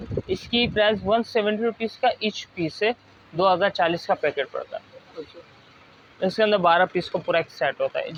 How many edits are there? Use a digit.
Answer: 0